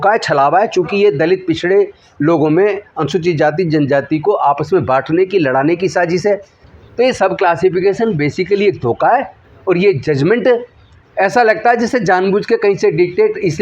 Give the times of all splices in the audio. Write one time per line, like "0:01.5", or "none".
0:06.6

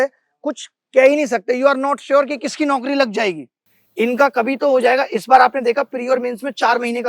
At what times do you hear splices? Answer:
0:03.5

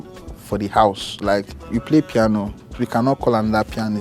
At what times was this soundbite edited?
0:01.7
0:02.8

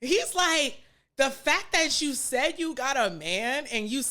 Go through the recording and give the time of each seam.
none

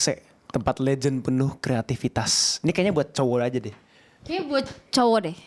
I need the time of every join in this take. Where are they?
none

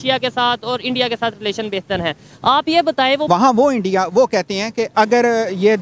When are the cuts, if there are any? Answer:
0:03.3
0:04.9

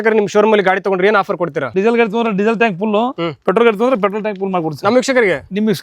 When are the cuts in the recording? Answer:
0:01.7

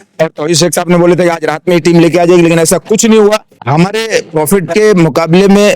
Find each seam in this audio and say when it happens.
0:03.5

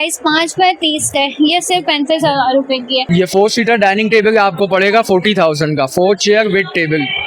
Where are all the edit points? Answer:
0:03.0

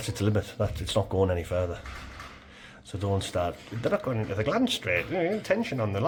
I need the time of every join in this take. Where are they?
none

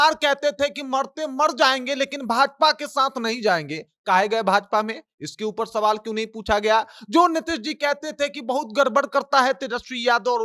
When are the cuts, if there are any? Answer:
none

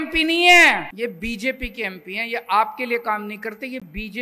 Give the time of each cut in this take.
0:00.9

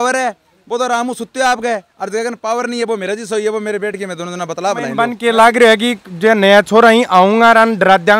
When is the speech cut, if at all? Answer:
0:05.0

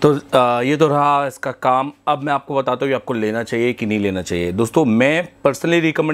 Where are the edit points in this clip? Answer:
none

